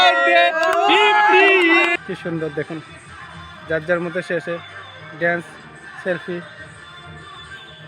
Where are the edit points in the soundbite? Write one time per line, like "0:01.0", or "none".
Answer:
0:02.0